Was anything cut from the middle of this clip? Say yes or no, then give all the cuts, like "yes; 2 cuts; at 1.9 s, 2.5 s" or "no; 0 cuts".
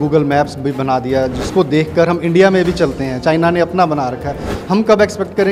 no; 0 cuts